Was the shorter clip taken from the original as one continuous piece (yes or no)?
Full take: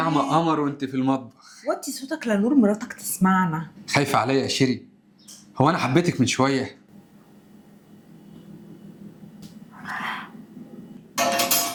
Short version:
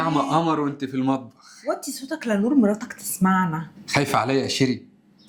yes